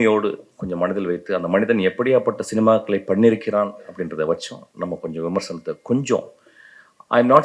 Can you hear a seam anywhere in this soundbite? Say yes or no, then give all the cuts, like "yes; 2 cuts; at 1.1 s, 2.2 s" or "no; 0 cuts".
no; 0 cuts